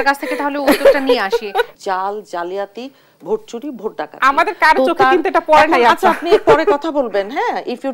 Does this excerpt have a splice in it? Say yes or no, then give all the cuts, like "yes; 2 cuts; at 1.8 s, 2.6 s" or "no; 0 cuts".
yes; 1 cut; at 1.7 s